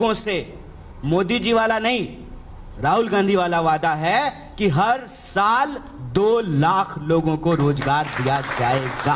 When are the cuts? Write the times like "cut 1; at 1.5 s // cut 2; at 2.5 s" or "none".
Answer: none